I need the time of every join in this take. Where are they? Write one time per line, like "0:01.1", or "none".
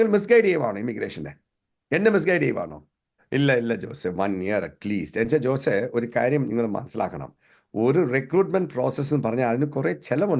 0:03.2

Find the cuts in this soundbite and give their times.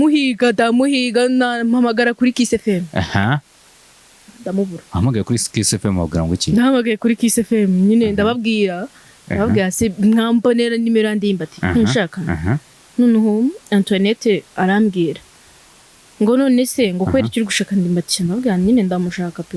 none

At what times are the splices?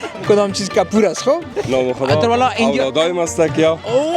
0:01.5

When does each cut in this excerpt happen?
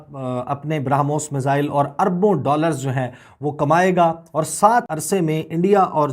0:04.9

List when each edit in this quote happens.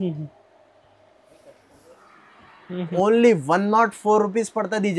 0:02.9

